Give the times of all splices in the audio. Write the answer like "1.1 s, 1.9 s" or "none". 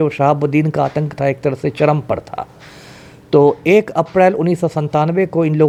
none